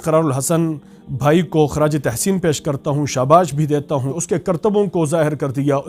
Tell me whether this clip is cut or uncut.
cut